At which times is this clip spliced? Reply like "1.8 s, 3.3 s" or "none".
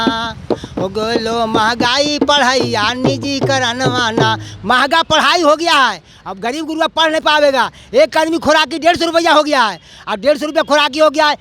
none

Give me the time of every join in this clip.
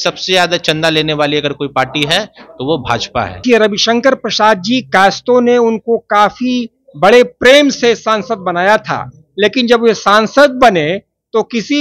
3.4 s

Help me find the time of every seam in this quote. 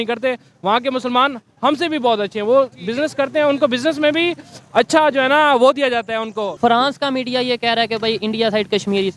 6.5 s

